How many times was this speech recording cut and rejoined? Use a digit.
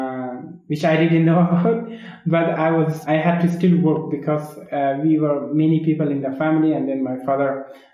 1